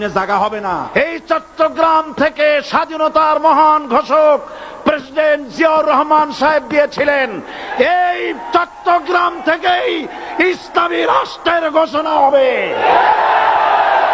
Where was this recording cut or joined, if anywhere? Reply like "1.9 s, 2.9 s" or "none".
0.9 s